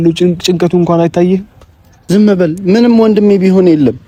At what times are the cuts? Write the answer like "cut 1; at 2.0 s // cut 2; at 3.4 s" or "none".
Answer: none